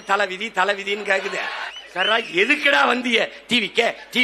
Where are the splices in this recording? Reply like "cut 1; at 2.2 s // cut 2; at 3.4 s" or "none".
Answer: cut 1; at 1.6 s